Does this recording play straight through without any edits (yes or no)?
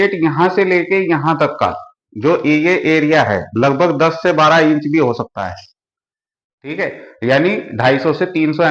yes